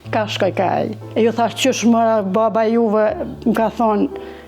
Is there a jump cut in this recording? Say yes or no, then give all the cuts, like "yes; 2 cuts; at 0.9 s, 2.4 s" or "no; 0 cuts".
yes; 1 cut; at 1.0 s